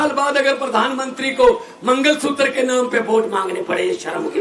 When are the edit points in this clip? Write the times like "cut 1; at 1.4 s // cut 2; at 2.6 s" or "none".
none